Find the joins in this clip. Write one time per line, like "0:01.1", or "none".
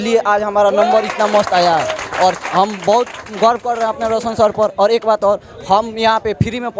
none